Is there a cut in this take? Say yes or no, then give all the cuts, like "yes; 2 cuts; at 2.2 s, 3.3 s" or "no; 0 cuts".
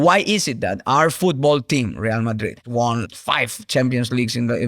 yes; 1 cut; at 2.6 s